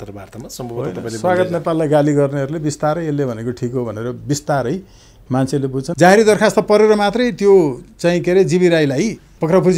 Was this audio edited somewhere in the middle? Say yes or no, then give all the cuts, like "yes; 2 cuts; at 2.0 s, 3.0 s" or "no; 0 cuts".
yes; 1 cut; at 5.9 s